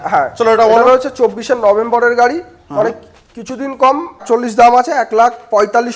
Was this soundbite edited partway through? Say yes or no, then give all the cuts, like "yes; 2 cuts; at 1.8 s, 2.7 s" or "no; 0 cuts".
yes; 1 cut; at 4.2 s